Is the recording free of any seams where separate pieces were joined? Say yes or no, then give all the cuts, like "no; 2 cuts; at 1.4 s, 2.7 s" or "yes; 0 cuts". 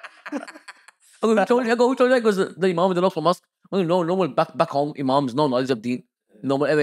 yes; 0 cuts